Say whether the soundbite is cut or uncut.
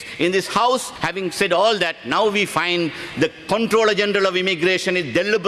cut